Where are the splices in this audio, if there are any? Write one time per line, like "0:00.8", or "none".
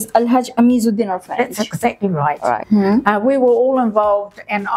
0:02.6